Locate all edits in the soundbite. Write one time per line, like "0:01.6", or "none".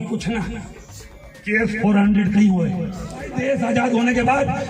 0:03.4